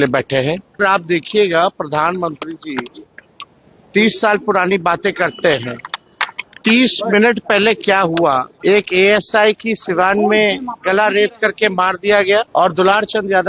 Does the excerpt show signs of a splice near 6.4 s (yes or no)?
no